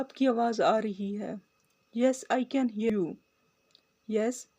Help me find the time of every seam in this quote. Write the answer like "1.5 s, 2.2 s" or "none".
2.9 s